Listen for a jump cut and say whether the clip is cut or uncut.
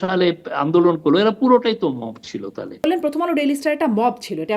cut